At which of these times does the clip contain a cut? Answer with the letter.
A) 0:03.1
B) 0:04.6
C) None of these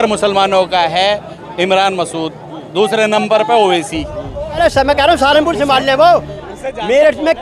B